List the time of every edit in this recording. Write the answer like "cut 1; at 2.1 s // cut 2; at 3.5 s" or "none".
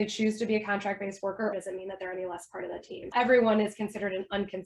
cut 1; at 1.5 s // cut 2; at 3.1 s

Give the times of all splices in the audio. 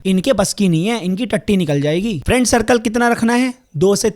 cut 1; at 2.2 s

